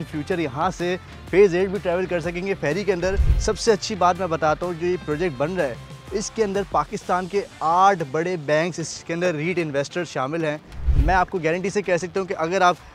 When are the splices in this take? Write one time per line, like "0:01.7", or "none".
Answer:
0:03.3
0:10.9